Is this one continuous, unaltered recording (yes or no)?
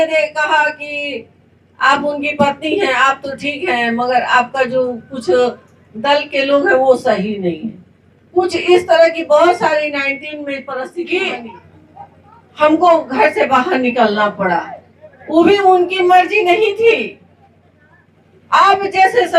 no